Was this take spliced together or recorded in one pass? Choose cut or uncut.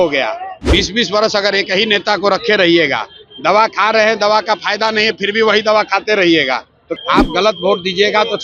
cut